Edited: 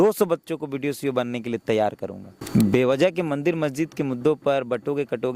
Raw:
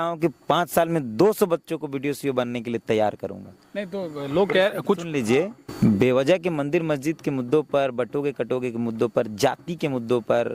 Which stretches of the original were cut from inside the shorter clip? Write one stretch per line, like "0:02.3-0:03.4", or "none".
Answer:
0:03.5-0:05.6

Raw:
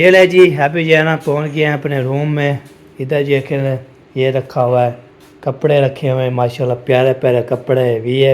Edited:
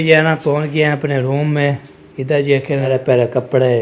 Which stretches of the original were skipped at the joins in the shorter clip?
0:03.7-0:07.0

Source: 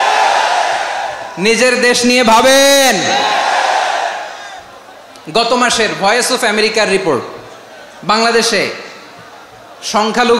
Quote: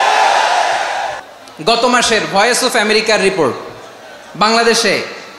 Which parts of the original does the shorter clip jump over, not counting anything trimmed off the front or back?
0:01.2-0:04.9

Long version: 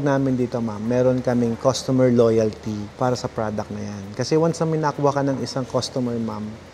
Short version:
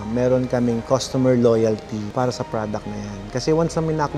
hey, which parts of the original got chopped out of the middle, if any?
0:02.8-0:02.9

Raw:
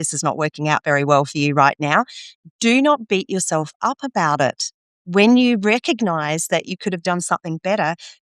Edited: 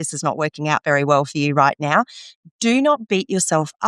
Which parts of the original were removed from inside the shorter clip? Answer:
none

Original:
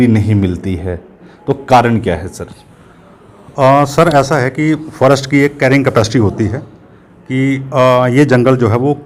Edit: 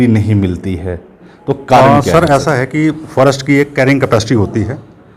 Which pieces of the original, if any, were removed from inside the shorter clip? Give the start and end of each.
0:01.8-0:03.6

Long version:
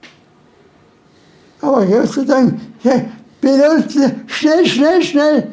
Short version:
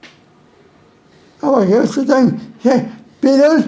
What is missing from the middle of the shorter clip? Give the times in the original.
0:01.1-0:01.3

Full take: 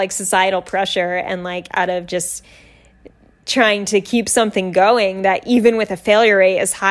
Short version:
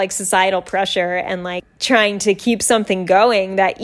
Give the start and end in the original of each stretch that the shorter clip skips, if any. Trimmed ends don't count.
0:01.6-0:03.3

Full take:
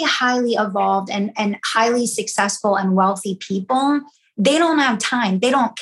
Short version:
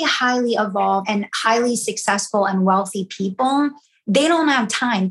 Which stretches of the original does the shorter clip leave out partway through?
0:01.0-0:01.4

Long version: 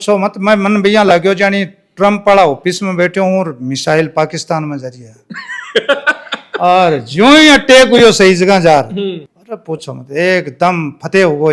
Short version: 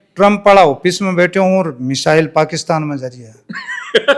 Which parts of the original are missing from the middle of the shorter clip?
none

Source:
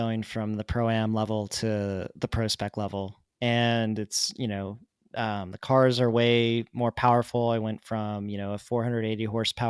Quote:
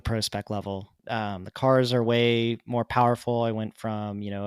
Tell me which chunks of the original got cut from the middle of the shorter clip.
0:03.2-0:05.0

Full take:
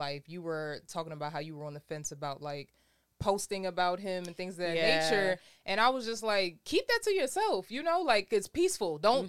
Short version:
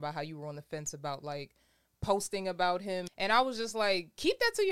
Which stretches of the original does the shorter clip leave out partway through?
0:04.3-0:05.6

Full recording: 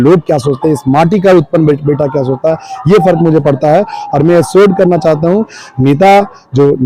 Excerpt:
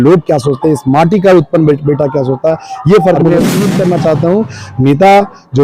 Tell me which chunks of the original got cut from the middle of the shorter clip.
0:03.2-0:04.2

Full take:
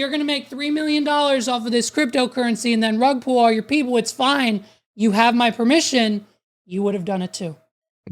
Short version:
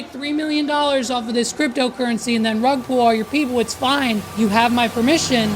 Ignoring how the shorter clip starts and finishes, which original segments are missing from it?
0:04.6-0:04.9

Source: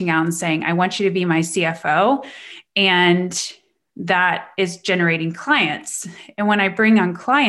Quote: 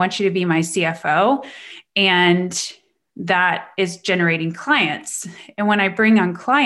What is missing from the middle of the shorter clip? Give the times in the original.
none

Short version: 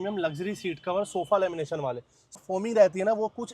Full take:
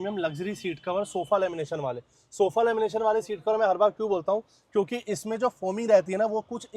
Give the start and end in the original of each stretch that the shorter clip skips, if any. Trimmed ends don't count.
0:02.4-0:05.5

